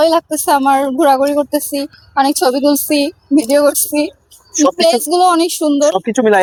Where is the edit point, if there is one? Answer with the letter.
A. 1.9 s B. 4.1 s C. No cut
C